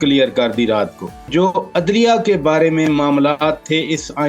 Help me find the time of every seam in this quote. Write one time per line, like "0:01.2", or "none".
0:01.3